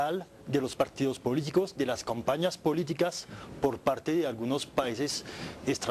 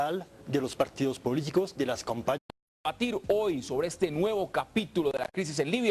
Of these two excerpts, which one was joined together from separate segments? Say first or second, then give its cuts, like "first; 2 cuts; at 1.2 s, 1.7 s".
first; 1 cut; at 2.4 s